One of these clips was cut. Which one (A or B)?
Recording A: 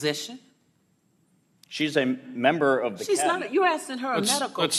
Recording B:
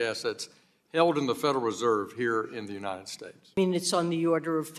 B